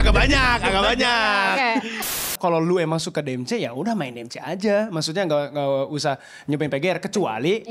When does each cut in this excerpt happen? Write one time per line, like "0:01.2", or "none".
0:02.2